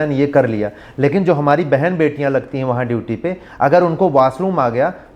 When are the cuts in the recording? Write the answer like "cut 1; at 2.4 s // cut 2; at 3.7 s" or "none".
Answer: none